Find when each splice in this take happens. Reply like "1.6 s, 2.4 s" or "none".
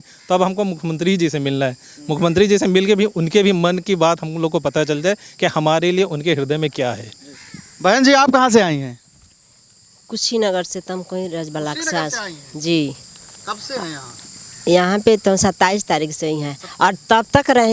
none